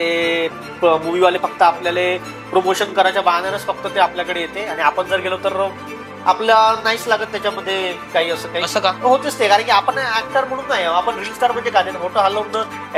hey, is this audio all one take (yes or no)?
no